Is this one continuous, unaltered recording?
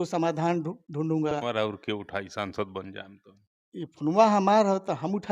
no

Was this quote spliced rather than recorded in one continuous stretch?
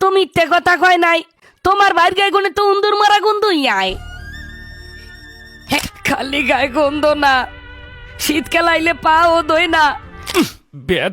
yes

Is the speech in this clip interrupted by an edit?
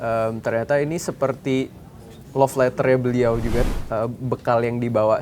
yes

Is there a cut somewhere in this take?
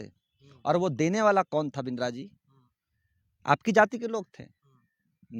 no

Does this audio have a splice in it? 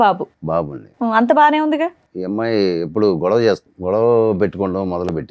yes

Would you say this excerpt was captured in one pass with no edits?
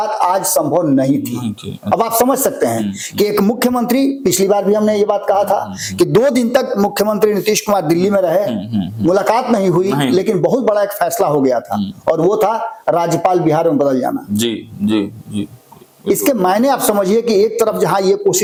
yes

